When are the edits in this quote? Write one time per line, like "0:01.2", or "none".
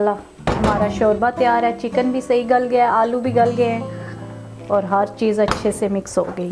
none